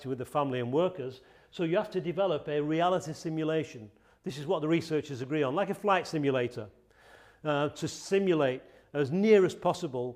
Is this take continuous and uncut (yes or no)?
yes